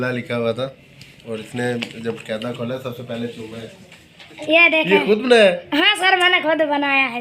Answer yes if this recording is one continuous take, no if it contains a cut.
no